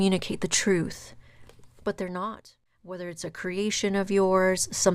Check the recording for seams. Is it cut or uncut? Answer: cut